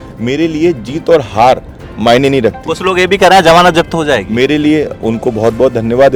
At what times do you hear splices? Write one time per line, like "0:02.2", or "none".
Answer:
none